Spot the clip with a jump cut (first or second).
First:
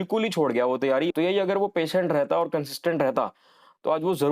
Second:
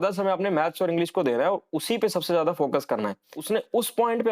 second